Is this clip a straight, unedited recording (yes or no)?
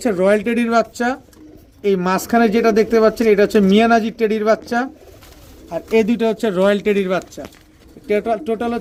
yes